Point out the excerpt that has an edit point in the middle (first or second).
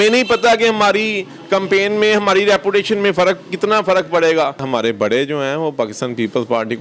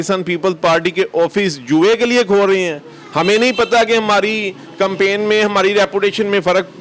first